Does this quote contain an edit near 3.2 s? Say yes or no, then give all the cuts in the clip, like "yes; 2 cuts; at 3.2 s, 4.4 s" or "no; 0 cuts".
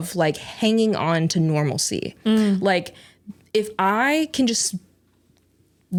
no; 0 cuts